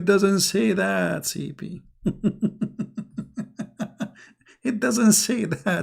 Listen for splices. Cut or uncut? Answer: uncut